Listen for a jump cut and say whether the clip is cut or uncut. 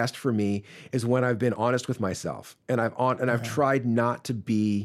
cut